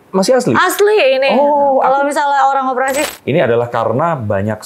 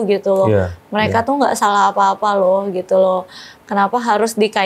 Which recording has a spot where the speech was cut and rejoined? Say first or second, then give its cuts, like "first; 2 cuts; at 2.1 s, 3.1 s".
first; 1 cut; at 3.1 s